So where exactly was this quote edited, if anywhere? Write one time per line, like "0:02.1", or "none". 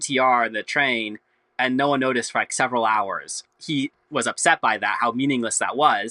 0:03.4